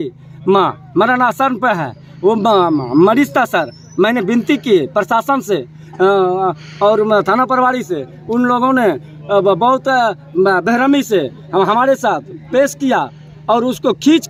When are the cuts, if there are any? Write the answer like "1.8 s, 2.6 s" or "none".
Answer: none